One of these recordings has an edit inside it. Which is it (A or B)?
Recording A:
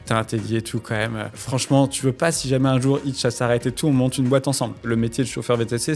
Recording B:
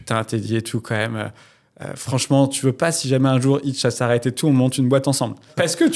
A